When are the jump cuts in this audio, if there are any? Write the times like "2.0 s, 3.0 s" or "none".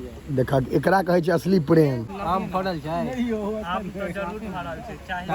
2.1 s